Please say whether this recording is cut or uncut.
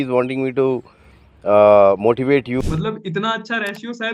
cut